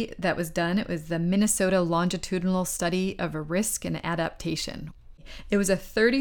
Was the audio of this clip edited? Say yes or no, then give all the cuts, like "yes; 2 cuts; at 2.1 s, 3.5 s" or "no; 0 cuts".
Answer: yes; 1 cut; at 5.1 s